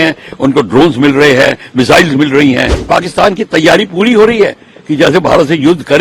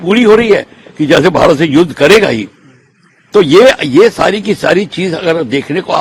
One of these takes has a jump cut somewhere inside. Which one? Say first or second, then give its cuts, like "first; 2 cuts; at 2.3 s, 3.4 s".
first; 1 cut; at 2.7 s